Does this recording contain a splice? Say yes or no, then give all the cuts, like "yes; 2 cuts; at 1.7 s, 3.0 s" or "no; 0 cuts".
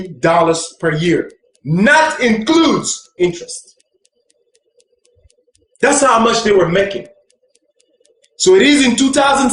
no; 0 cuts